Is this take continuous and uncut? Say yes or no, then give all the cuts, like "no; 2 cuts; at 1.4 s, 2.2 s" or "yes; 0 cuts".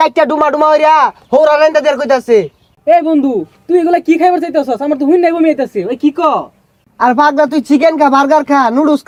yes; 0 cuts